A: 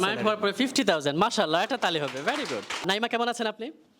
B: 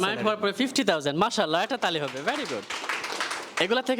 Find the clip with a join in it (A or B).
A